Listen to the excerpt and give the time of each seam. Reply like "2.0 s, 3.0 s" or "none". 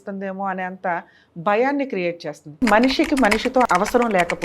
2.6 s, 3.7 s